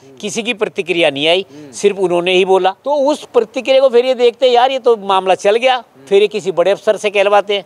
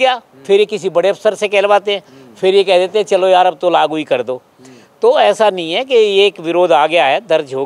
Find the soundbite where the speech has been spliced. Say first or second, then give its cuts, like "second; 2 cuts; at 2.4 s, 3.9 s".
first; 1 cut; at 2.8 s